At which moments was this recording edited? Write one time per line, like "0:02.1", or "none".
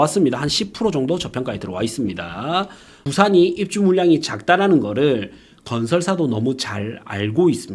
0:03.0